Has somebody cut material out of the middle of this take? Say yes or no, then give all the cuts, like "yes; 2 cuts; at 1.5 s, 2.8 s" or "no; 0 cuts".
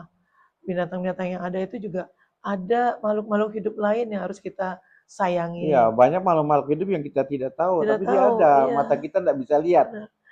no; 0 cuts